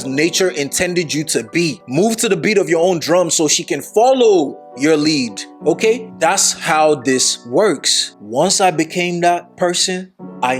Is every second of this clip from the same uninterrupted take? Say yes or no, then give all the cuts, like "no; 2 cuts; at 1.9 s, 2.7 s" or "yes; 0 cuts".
no; 1 cut; at 8.1 s